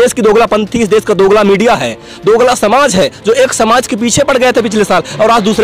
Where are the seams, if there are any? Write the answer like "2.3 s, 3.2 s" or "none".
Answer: none